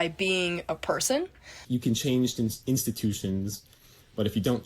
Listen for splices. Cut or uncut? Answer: cut